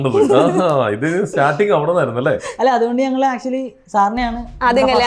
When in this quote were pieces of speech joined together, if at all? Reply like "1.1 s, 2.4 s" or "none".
none